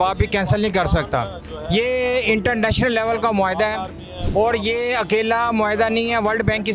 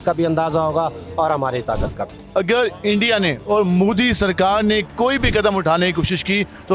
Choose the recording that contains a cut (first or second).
second